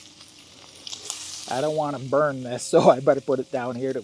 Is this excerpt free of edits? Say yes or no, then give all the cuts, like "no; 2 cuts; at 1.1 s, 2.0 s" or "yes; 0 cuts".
yes; 0 cuts